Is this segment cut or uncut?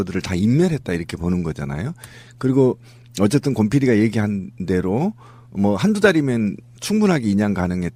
uncut